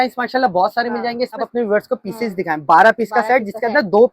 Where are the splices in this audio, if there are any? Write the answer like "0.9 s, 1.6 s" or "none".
1.5 s